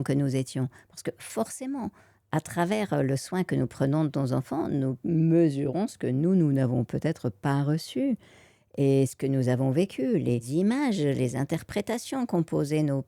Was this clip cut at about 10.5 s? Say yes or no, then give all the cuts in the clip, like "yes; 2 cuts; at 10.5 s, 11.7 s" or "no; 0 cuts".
yes; 1 cut; at 10.5 s